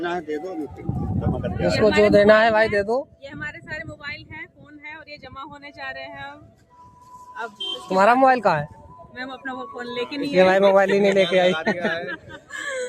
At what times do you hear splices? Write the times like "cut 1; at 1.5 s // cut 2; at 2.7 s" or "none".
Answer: none